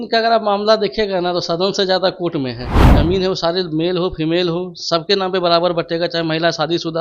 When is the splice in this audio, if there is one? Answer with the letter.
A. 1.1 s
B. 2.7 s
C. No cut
B